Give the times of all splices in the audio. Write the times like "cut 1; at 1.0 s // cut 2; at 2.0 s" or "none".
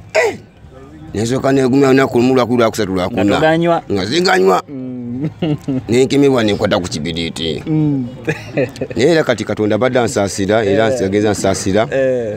none

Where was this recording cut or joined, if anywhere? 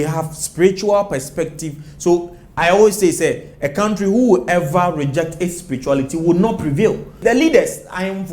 cut 1; at 7.2 s

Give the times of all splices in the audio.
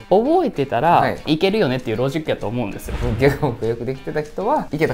cut 1; at 3.0 s

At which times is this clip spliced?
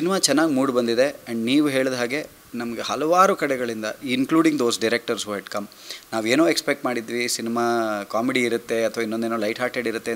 none

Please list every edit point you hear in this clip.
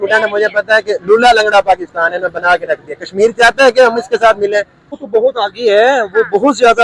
cut 1; at 5.0 s

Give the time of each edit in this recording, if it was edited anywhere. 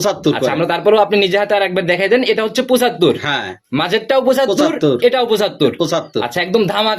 none

